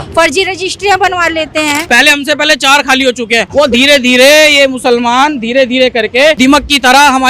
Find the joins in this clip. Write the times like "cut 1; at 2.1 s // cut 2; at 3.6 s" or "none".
cut 1; at 1.8 s // cut 2; at 3.5 s // cut 3; at 6.4 s